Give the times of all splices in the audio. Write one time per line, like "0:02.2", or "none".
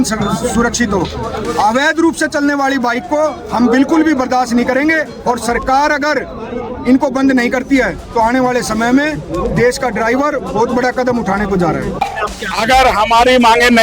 0:12.0